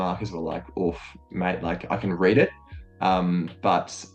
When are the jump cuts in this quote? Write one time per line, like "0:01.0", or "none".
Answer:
none